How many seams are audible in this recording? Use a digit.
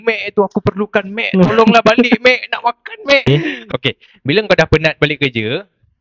1